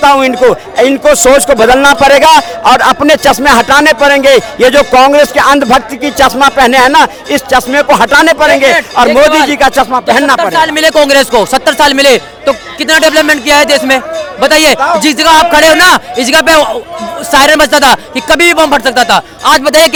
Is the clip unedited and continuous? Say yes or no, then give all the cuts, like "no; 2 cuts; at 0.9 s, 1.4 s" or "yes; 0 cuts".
yes; 0 cuts